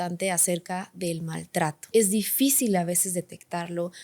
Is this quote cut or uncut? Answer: cut